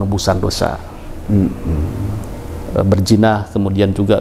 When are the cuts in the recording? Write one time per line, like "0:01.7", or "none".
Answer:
none